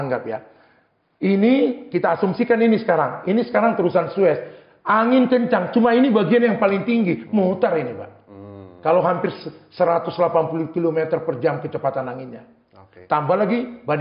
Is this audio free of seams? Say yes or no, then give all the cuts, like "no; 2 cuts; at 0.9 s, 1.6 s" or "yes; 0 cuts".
yes; 0 cuts